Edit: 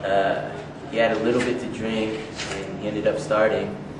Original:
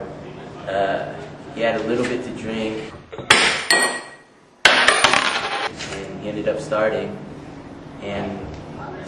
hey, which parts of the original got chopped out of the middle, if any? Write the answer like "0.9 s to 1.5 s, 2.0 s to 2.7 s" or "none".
3.0 s to 5.8 s